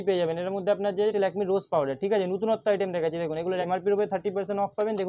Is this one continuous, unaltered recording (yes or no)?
no